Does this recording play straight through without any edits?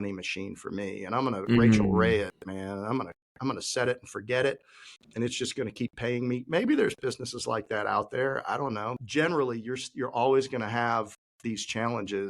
no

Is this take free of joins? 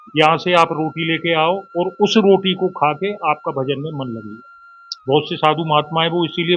yes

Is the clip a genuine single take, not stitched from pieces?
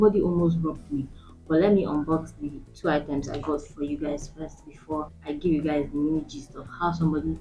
yes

